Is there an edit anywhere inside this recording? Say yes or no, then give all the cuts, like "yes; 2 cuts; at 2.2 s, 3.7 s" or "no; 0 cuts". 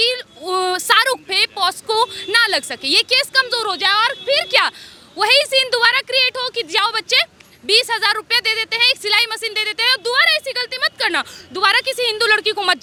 no; 0 cuts